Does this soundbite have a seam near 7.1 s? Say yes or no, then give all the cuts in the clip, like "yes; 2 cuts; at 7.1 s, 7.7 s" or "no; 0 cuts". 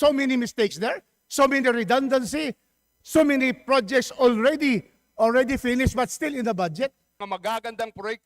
yes; 1 cut; at 7.1 s